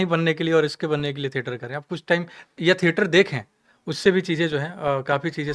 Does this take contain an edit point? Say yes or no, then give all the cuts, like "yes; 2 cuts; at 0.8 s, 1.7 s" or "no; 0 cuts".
no; 0 cuts